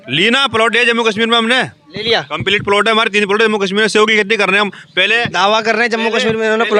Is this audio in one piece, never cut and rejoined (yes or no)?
yes